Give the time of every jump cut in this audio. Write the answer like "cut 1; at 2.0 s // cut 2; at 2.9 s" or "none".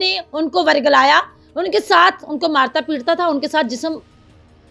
none